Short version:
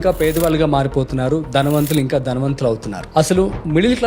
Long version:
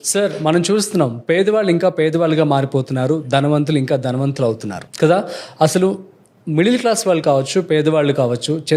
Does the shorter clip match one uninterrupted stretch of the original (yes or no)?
no